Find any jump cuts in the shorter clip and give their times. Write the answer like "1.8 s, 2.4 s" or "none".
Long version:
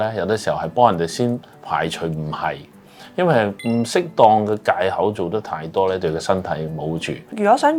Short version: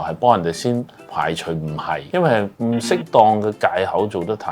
2.0 s

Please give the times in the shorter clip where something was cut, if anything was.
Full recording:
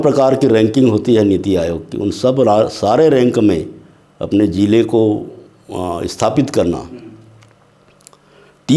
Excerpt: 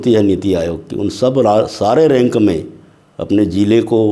none

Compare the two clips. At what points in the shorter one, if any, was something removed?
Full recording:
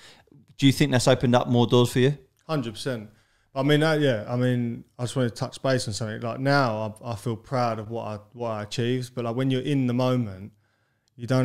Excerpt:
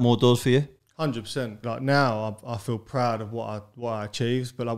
1.6 s

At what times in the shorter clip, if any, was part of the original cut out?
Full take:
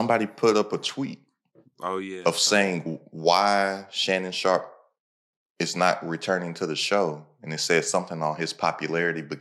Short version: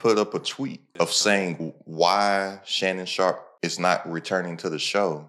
0.9 s, 3.5 s

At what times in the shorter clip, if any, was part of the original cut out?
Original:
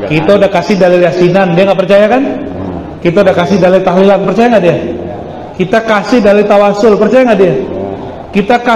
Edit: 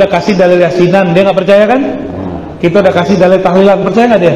none

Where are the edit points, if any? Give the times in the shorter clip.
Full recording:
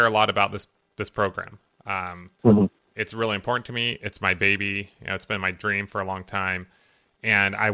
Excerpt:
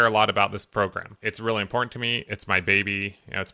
1.0 s

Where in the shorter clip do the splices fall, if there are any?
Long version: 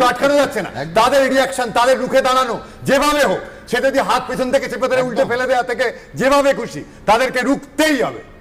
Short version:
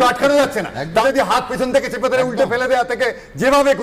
1.0 s

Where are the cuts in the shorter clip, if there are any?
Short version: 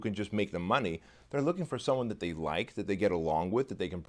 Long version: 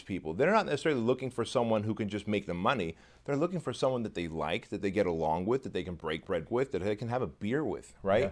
none

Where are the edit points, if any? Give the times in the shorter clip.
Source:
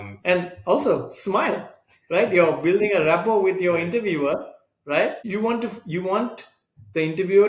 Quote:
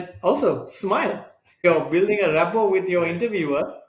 1.6 s

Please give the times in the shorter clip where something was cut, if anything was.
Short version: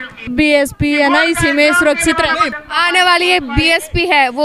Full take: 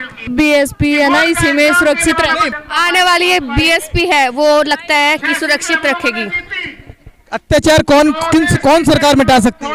none

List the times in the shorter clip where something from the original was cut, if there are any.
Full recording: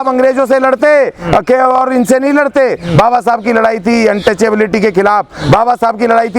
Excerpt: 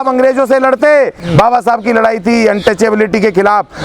1.2 s

